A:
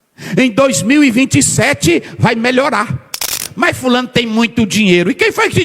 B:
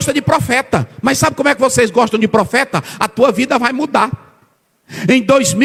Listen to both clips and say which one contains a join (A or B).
A